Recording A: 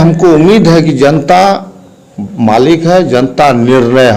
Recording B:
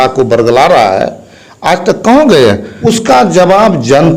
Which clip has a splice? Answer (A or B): B